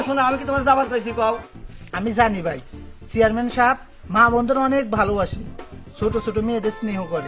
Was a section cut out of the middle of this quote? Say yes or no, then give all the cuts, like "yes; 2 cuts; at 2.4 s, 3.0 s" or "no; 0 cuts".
yes; 1 cut; at 1.5 s